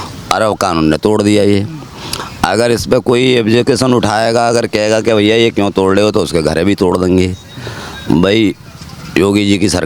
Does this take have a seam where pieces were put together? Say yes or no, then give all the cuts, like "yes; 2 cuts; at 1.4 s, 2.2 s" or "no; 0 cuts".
no; 0 cuts